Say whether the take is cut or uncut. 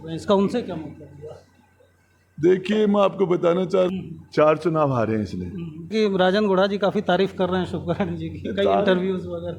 cut